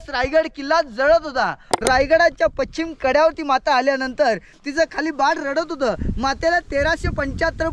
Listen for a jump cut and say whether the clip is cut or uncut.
cut